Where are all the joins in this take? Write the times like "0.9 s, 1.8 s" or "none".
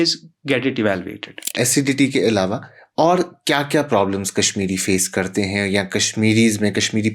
1.5 s